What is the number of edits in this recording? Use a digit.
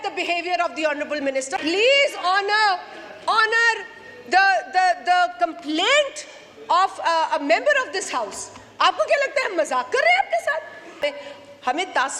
2